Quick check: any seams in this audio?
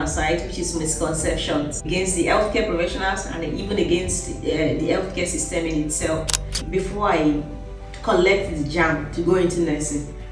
yes; 2 cuts; at 1.9 s, 6.6 s

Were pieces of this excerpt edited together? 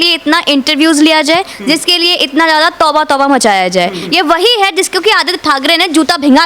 yes; 1 cut; at 4.0 s

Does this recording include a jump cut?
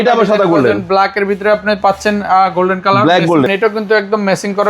yes; 1 cut; at 3.5 s

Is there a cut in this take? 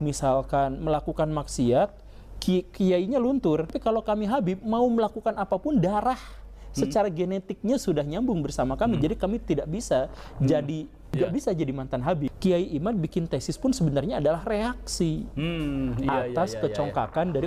yes; 3 cuts; at 3.8 s, 11.2 s, 12.3 s

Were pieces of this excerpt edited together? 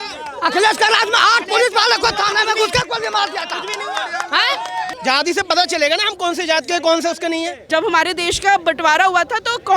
yes; 2 cuts; at 4.9 s, 7.6 s

